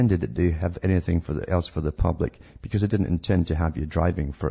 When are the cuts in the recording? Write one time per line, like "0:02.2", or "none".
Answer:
0:03.4